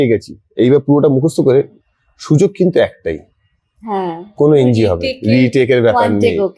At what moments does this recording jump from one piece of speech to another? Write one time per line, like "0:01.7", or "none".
none